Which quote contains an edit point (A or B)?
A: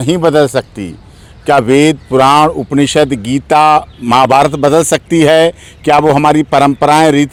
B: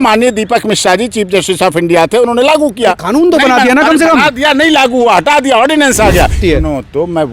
B